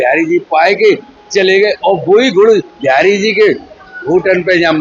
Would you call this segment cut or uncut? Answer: uncut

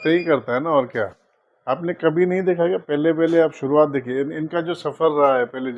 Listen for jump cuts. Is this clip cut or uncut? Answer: uncut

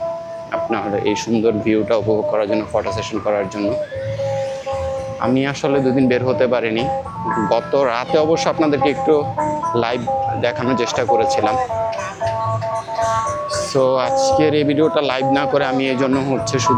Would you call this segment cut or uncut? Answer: uncut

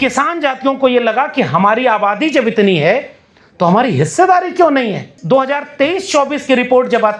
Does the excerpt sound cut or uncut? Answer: cut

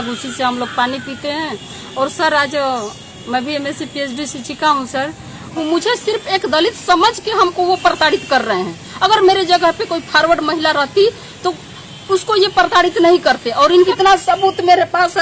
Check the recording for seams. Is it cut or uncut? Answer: cut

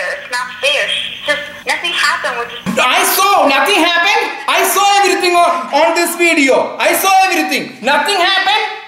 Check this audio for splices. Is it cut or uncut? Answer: cut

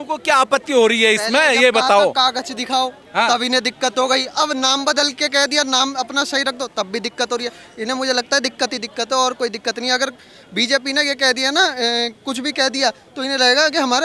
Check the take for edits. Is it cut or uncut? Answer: uncut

